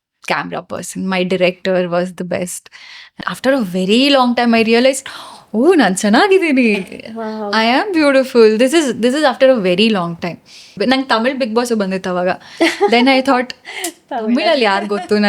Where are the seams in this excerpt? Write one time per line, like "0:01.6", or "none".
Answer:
0:03.2
0:10.8